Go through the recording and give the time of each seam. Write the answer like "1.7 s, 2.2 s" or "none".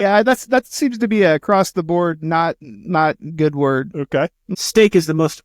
4.4 s